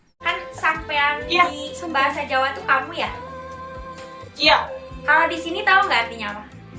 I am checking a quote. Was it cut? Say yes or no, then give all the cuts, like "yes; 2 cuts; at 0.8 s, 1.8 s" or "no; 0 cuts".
no; 0 cuts